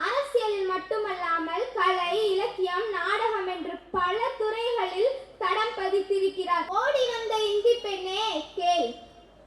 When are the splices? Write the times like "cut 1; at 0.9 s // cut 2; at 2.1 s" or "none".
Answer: cut 1; at 6.7 s